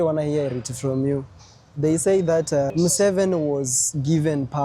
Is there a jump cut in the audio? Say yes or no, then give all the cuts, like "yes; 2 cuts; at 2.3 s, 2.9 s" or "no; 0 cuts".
yes; 1 cut; at 2.7 s